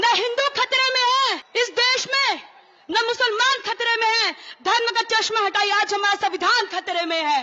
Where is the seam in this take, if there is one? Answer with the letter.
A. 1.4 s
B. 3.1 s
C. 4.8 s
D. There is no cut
A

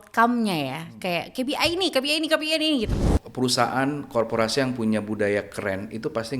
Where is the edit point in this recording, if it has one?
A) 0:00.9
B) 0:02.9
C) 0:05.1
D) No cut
B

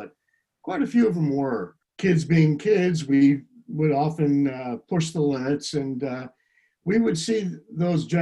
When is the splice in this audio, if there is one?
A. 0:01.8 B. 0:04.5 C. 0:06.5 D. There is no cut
A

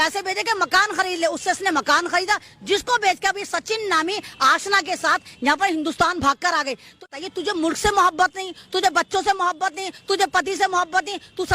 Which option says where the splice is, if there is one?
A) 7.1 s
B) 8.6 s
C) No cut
A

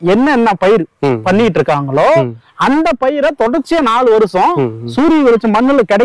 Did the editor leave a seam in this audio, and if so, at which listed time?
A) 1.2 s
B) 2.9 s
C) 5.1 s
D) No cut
D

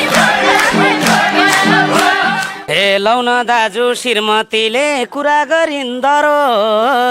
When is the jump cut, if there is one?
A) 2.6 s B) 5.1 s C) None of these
A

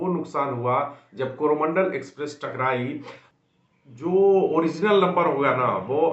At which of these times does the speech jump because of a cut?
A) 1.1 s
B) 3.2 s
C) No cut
B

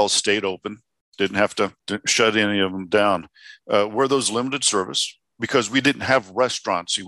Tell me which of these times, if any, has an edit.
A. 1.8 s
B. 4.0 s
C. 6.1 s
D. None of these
A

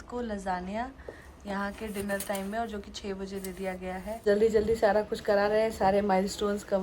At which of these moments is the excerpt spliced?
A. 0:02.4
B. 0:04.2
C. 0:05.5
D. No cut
B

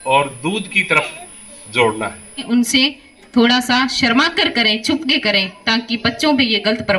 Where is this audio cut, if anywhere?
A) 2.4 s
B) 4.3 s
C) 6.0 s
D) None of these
A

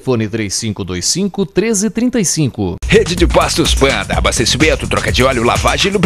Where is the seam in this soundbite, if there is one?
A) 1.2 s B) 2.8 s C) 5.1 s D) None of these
B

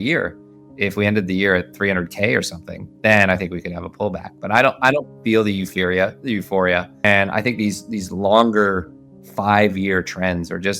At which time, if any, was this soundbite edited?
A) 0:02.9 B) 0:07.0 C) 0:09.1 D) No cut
B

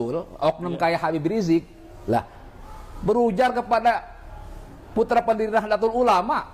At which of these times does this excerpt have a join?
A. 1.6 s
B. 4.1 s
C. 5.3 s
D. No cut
D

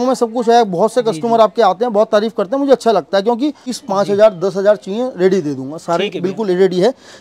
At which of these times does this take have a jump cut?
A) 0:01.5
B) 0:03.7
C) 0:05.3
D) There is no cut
B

